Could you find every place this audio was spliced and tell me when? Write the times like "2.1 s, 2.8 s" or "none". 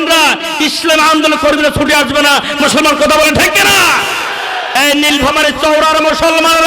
4.7 s